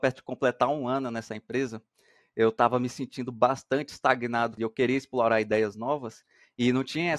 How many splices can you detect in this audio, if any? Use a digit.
1